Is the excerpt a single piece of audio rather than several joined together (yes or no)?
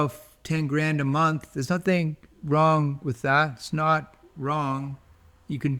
yes